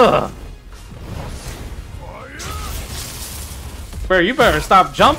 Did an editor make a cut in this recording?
no; 0 cuts

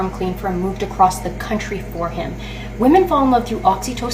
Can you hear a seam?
no; 0 cuts

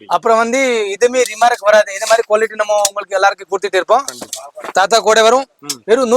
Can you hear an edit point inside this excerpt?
no; 0 cuts

